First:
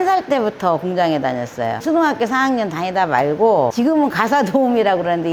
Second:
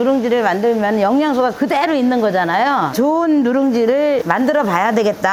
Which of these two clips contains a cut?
first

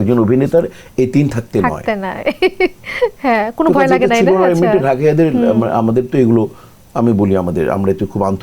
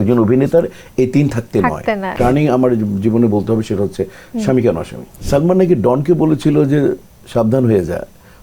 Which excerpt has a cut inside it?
second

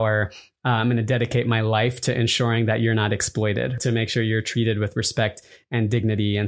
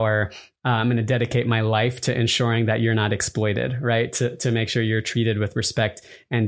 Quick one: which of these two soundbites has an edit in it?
first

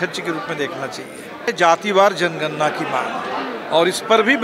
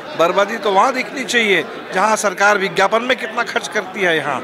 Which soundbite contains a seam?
first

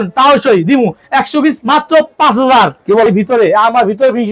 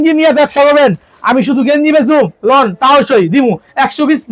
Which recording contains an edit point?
first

